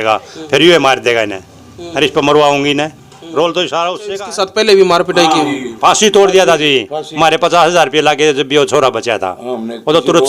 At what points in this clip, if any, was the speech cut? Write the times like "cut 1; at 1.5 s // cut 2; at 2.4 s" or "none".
cut 1; at 4.0 s